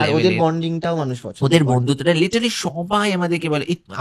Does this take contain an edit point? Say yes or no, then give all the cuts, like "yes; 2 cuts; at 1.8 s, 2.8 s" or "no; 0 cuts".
no; 0 cuts